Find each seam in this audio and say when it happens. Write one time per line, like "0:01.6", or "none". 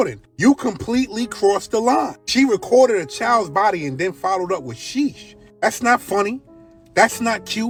none